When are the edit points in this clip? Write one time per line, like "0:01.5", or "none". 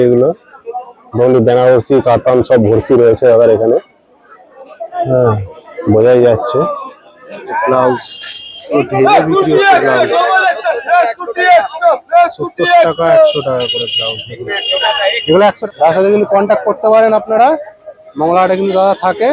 0:07.4
0:15.6